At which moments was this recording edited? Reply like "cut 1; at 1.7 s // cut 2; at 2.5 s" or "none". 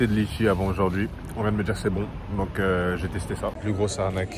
cut 1; at 1.2 s // cut 2; at 3.6 s